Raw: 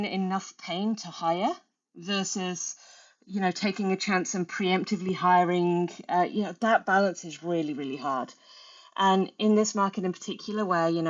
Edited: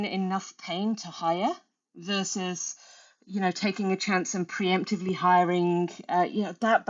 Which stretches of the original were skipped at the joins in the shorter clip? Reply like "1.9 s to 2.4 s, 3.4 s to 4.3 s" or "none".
none